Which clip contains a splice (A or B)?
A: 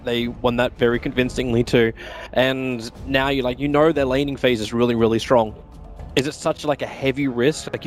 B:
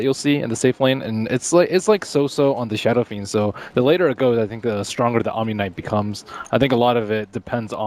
B